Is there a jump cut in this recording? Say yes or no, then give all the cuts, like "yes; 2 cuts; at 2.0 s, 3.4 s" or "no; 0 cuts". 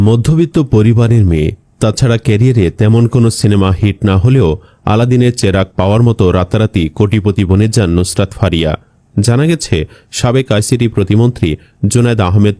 no; 0 cuts